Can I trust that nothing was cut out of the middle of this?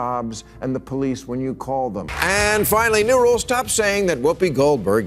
no; 1 cut; at 2.1 s

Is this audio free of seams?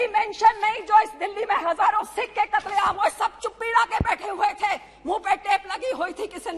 yes; 0 cuts

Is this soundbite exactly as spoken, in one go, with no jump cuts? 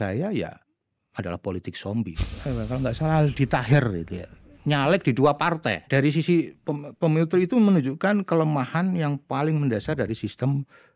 no; 2 cuts; at 2.2 s, 5.8 s

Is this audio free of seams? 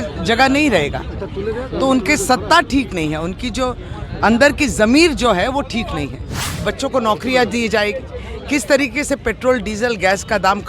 no; 1 cut; at 6.6 s

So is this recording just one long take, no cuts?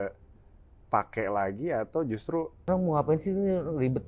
no; 1 cut; at 2.7 s

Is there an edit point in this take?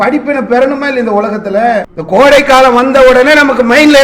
yes; 1 cut; at 2.0 s

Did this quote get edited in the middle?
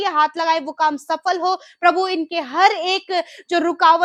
no; 0 cuts

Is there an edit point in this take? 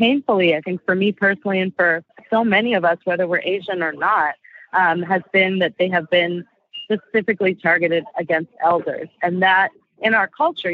yes; 1 cut; at 2.1 s

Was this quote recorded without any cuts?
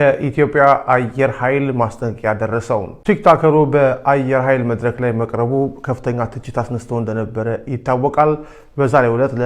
yes; 0 cuts

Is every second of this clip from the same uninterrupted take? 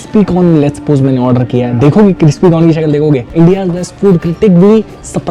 yes; 0 cuts

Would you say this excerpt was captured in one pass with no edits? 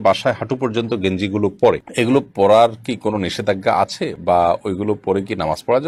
yes; 0 cuts

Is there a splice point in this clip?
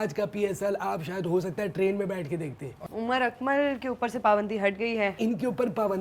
yes; 2 cuts; at 2.8 s, 5.2 s

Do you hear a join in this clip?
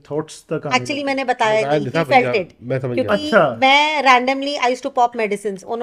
no; 0 cuts

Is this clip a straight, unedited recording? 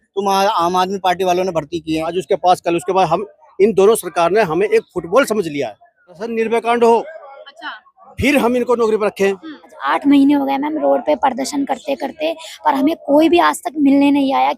no; 3 cuts; at 2.1 s, 6.2 s, 9.8 s

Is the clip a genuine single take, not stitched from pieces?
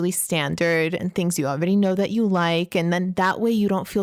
yes; 0 cuts

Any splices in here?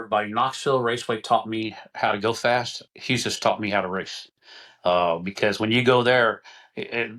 no; 0 cuts

